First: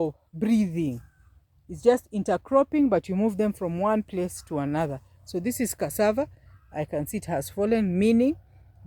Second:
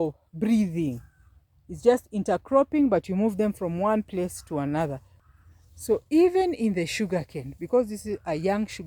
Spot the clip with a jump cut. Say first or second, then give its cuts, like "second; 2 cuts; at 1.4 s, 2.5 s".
second; 1 cut; at 5.1 s